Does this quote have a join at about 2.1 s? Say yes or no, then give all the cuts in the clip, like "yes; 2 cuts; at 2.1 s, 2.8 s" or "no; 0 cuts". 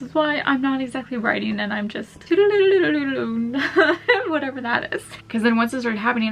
yes; 2 cuts; at 2.1 s, 5.2 s